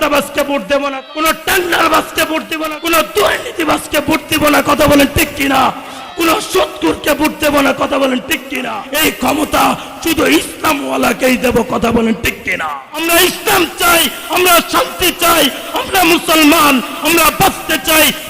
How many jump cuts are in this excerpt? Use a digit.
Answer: 4